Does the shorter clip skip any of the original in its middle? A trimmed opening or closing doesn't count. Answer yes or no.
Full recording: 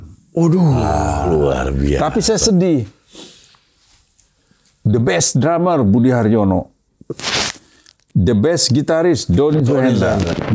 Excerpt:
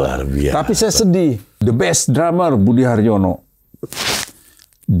yes